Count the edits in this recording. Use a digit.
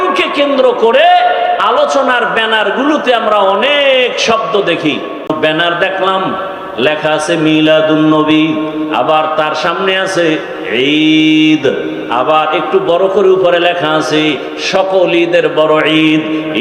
1